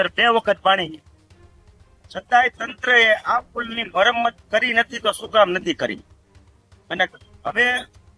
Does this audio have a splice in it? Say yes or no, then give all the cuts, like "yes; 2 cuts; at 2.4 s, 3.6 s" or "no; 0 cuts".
no; 0 cuts